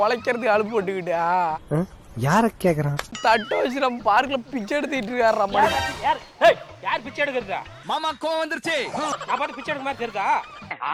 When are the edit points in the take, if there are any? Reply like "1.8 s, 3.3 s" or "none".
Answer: none